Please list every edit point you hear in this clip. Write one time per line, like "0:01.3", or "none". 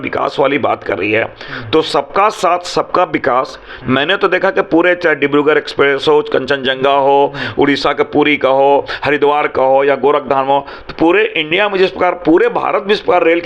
none